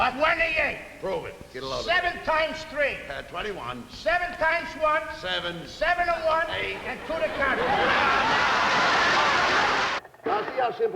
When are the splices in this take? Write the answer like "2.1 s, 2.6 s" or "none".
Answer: 9.9 s